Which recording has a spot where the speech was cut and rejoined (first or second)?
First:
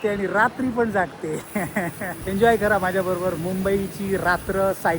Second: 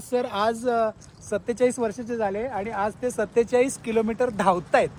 first